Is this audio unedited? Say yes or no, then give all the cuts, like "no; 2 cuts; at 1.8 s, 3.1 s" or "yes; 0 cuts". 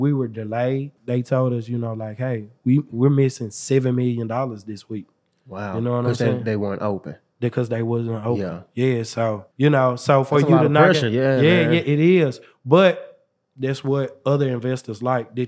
no; 2 cuts; at 0.9 s, 9.5 s